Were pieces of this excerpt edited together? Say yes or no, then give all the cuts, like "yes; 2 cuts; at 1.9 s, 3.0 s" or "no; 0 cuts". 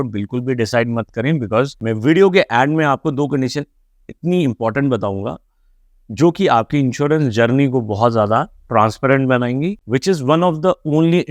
yes; 2 cuts; at 1.8 s, 9.8 s